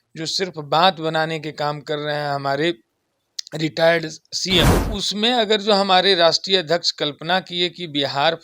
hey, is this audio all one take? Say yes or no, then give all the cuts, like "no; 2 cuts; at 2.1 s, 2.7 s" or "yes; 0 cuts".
no; 1 cut; at 4.7 s